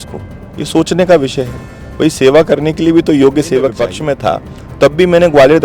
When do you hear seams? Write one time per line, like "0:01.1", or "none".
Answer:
0:03.9